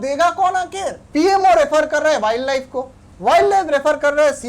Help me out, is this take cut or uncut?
cut